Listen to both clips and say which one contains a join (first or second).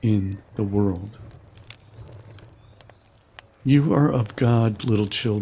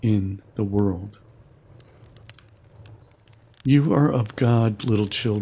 first